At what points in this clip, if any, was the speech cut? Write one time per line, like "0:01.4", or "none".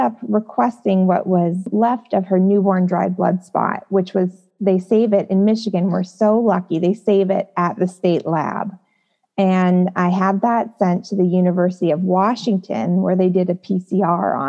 0:01.7